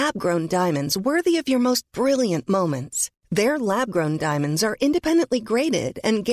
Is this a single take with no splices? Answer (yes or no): yes